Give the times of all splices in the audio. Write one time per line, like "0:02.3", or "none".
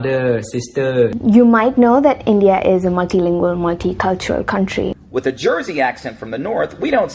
0:01.2
0:04.9